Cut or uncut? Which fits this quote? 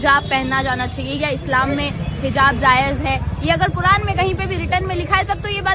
uncut